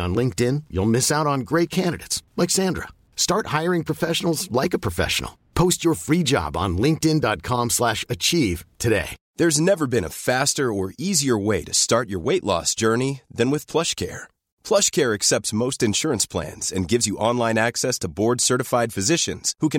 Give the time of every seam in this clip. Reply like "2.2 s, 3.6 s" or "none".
9.2 s